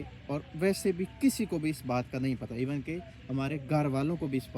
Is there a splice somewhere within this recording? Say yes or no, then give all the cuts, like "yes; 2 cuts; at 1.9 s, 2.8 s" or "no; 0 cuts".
no; 0 cuts